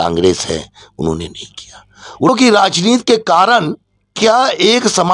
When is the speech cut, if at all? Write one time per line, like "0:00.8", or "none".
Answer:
0:02.3